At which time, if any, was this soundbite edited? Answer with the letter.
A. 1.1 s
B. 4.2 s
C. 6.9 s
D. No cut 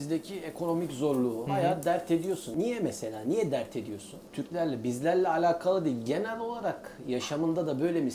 D